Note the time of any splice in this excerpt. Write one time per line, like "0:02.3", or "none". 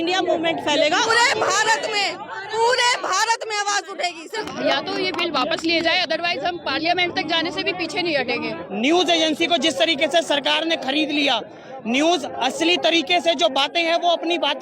0:01.1
0:04.5
0:08.6